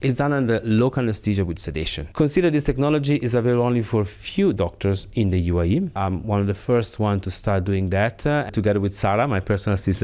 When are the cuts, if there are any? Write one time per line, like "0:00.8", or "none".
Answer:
0:02.0
0:06.0
0:08.5

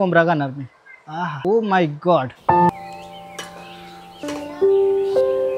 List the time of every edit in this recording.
0:01.3
0:02.7
0:04.2

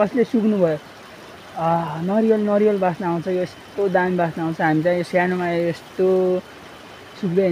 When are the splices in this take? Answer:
none

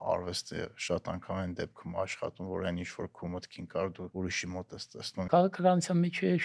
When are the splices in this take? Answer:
0:04.1
0:05.3

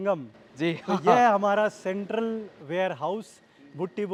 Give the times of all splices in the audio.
none

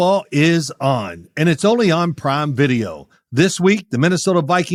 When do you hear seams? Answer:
none

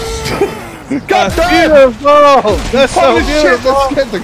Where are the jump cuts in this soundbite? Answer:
none

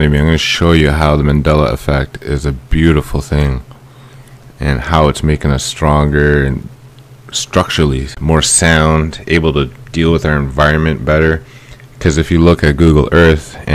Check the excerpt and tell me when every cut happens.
none

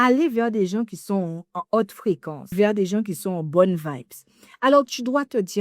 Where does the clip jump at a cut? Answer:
0:02.4

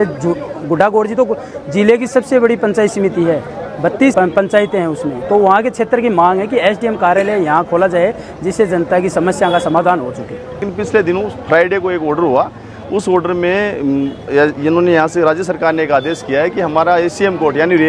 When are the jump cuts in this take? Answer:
0:04.1
0:10.7

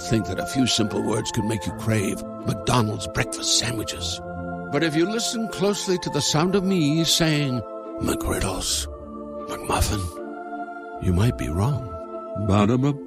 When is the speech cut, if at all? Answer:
none

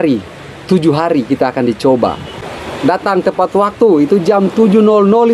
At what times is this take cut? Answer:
0:02.3

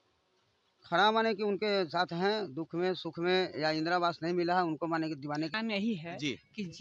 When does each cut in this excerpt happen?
0:05.5

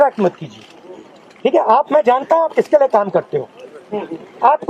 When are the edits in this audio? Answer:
none

